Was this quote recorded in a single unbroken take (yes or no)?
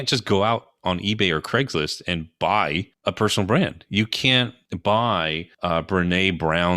no